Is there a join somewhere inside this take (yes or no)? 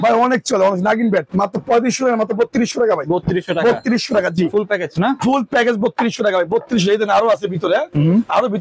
no